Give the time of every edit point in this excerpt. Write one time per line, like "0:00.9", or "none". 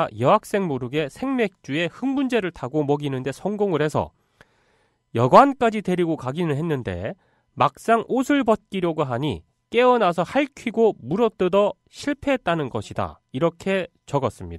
0:08.1